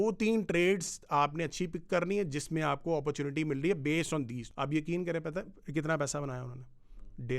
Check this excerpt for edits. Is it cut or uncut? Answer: cut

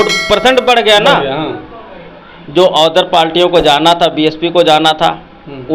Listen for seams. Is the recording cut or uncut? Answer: uncut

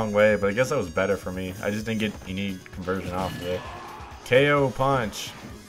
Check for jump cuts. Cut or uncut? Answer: uncut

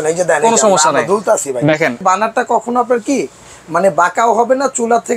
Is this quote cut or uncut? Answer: cut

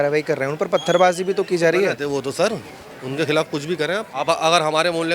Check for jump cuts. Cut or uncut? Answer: cut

